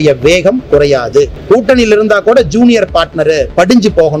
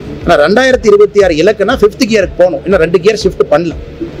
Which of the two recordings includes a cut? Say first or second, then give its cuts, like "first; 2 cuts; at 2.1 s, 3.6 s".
first; 1 cut; at 1.4 s